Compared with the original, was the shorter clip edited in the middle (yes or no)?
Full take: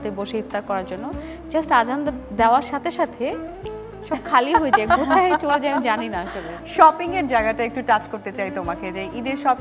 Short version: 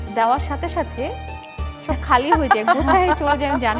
no